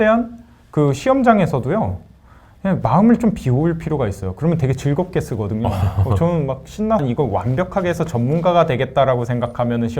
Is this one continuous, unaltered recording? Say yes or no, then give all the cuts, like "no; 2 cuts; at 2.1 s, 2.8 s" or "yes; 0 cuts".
no; 1 cut; at 7.0 s